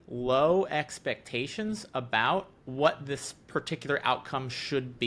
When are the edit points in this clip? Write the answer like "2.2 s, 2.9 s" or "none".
none